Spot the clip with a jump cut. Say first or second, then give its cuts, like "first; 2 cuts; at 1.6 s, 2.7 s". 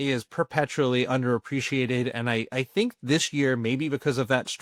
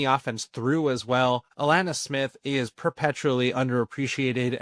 second; 1 cut; at 1.5 s